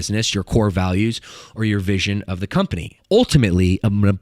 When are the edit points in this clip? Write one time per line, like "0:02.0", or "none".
0:02.9